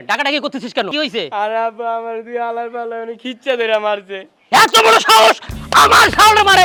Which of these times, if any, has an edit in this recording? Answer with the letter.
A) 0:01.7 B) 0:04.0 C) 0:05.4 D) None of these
D